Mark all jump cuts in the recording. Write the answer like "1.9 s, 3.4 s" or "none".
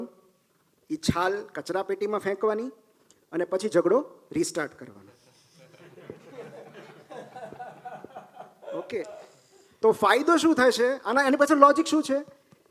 none